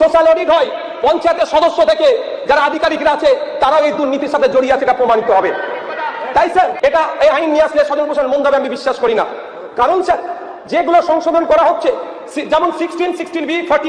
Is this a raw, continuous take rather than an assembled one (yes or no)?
no